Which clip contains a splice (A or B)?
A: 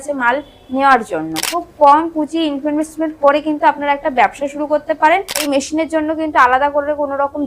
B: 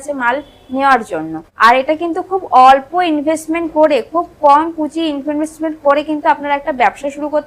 A